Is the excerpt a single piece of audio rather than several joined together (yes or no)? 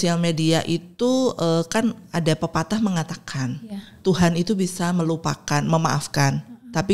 yes